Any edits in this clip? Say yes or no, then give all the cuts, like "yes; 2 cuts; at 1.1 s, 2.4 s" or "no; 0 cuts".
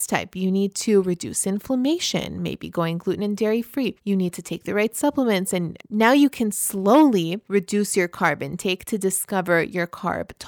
yes; 3 cuts; at 4.0 s, 5.8 s, 7.4 s